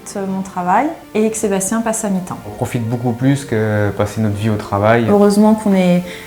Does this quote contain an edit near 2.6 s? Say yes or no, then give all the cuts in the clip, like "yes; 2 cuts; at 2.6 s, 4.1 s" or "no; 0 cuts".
yes; 3 cuts; at 1.0 s, 2.6 s, 5.1 s